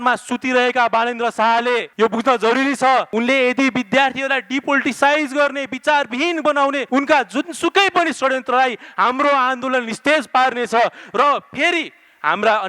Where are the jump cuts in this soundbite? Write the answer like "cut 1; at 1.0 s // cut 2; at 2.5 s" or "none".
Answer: cut 1; at 1.9 s // cut 2; at 3.1 s // cut 3; at 6.8 s